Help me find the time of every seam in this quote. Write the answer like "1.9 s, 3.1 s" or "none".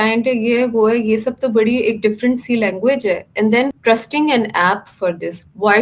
3.8 s